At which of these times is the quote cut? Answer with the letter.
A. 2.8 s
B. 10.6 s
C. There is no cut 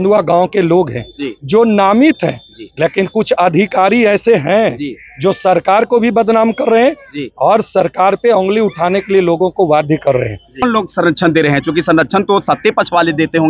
B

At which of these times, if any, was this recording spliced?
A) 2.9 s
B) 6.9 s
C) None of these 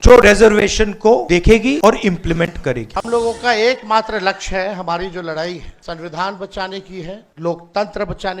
A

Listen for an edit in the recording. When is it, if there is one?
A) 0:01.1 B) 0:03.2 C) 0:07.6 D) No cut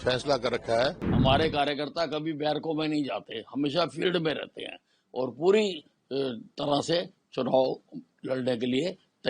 A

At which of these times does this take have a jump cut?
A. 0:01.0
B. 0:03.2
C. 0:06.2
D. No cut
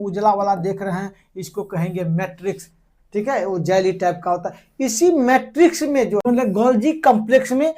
C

